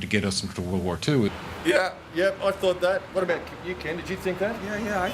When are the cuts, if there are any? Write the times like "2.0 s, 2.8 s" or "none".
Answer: none

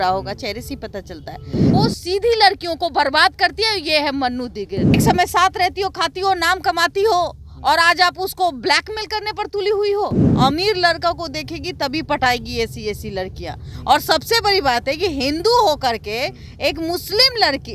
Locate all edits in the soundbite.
1.6 s, 5.0 s, 10.2 s

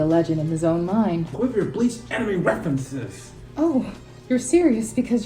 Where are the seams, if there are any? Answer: 1.3 s

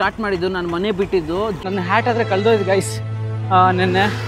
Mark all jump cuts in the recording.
1.6 s

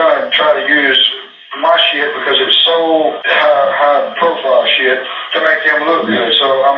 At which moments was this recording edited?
3.2 s

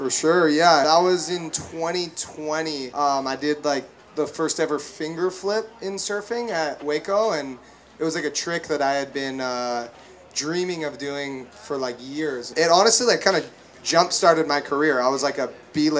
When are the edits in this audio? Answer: 0.8 s, 2.9 s, 12.5 s

